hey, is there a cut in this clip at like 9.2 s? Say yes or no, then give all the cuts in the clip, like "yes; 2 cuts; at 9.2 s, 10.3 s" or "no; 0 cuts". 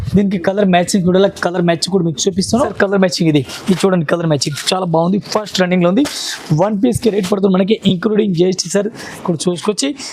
yes; 2 cuts; at 2.7 s, 9.2 s